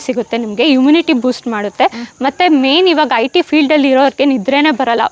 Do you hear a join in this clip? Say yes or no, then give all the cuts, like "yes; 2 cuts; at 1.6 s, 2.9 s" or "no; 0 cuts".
no; 0 cuts